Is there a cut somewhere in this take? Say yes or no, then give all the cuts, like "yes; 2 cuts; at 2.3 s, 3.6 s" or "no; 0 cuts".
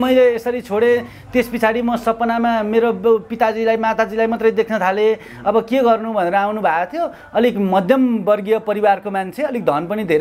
no; 0 cuts